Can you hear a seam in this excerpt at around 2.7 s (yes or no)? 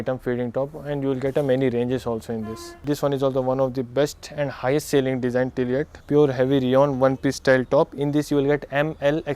yes